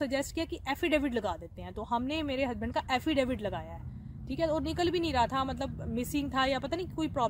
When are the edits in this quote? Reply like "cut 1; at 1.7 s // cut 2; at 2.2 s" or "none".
none